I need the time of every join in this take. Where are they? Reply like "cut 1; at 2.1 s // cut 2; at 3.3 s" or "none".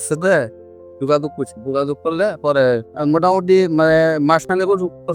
cut 1; at 2.9 s

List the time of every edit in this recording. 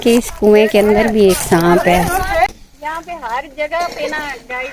cut 1; at 2.5 s

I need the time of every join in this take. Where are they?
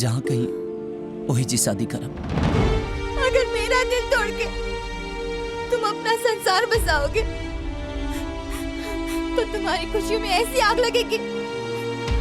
cut 1; at 2.7 s

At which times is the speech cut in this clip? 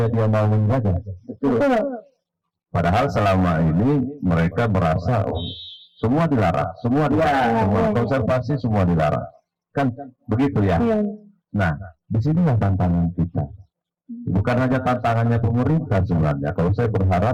none

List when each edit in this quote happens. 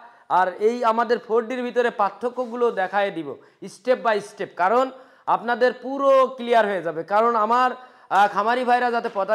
none

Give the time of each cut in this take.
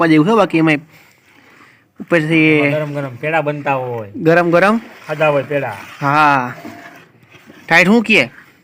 none

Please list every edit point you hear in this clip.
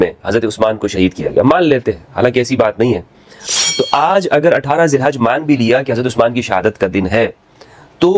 cut 1; at 3.5 s

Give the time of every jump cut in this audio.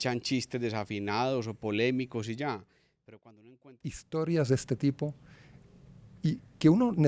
cut 1; at 3.7 s

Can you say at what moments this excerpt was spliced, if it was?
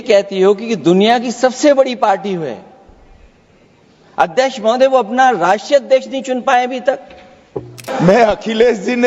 cut 1; at 7.8 s

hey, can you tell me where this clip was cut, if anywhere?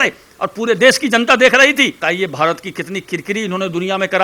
cut 1; at 2.0 s

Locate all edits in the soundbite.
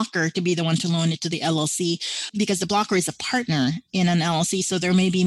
cut 1; at 2.3 s

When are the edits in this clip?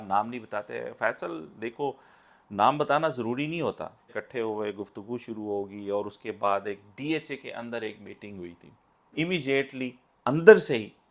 cut 1; at 4.1 s // cut 2; at 9.1 s

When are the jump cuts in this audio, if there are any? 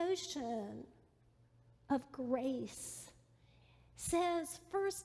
none

